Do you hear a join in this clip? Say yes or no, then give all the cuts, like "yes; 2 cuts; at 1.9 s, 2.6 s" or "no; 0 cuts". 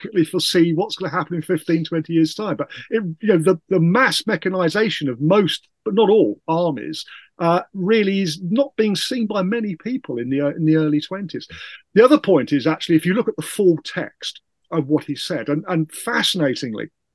no; 0 cuts